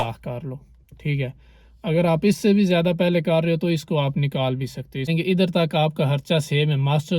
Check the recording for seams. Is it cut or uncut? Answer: cut